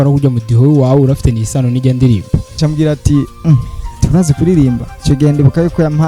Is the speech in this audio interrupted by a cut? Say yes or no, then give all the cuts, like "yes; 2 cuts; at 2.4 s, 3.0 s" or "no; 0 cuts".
yes; 2 cuts; at 2.6 s, 4.9 s